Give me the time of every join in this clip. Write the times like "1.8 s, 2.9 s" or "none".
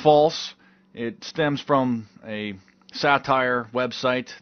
1.2 s